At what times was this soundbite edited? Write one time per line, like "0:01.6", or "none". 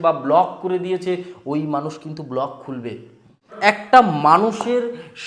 0:03.8